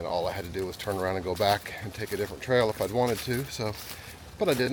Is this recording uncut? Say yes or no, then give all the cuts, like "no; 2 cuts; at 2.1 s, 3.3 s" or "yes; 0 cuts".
yes; 0 cuts